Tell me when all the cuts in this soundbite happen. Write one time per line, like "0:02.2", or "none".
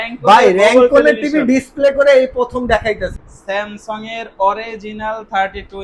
0:03.2